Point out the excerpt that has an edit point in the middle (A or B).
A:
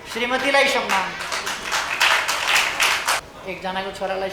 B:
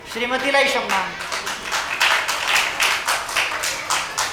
A